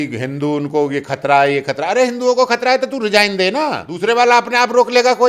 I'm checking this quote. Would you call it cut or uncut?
cut